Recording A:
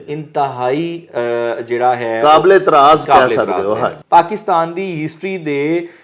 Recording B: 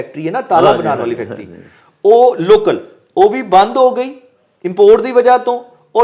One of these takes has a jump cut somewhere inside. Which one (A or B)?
A